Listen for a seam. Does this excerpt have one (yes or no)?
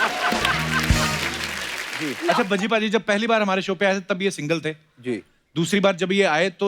yes